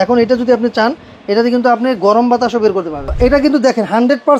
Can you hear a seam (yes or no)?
yes